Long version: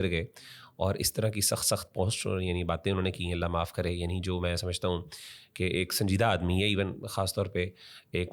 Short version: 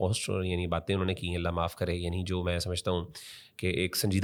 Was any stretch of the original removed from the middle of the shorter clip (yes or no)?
no